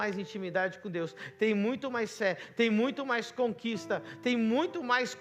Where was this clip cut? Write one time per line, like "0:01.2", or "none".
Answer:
none